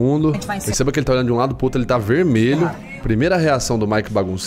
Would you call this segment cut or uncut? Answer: cut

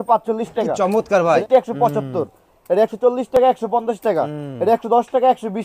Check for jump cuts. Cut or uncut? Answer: cut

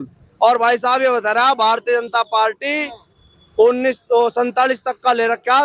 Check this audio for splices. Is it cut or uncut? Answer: uncut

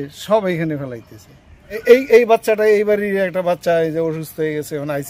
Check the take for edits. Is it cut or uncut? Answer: cut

